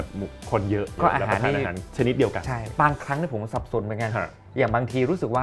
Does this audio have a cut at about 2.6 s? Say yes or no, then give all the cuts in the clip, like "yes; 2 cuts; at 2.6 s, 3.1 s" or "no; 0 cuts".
yes; 3 cuts; at 1.0 s, 1.8 s, 2.6 s